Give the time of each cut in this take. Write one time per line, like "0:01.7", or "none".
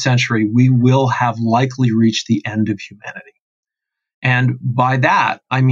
none